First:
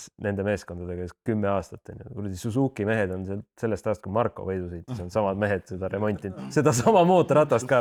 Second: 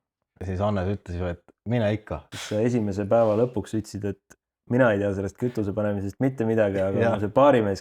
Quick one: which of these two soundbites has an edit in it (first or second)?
second